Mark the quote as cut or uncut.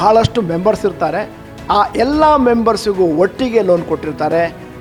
uncut